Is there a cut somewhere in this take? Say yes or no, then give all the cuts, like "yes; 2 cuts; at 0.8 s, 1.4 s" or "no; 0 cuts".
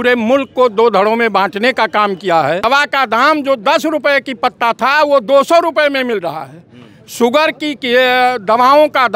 yes; 1 cut; at 2.6 s